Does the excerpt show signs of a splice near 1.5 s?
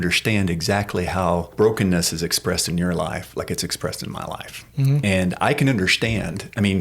yes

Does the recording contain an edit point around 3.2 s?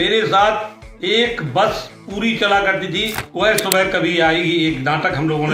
yes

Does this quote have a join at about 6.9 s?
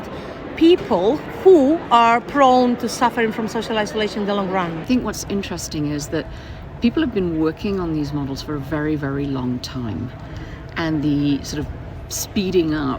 no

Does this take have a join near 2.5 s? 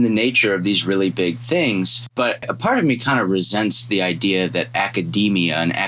yes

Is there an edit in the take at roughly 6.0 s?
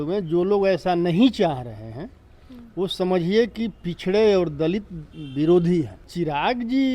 yes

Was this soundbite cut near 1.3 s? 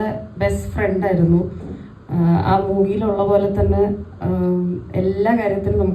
no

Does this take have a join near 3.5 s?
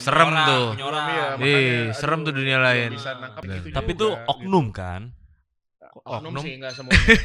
yes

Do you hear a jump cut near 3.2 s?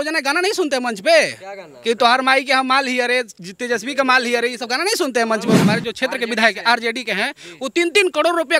no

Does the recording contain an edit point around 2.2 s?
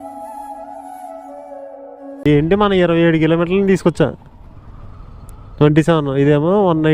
yes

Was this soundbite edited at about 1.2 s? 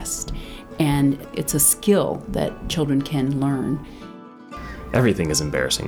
yes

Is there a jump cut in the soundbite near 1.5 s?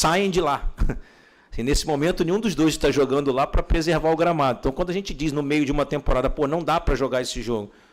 no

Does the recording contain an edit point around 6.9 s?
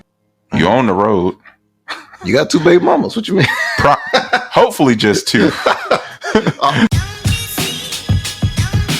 yes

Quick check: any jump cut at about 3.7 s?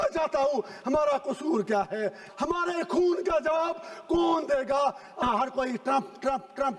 no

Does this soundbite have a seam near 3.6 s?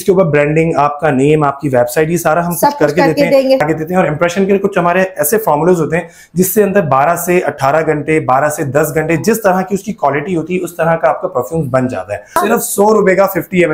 yes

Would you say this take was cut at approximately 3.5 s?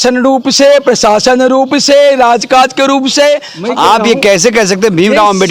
yes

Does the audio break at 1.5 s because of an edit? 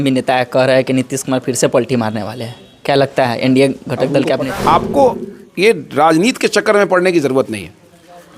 no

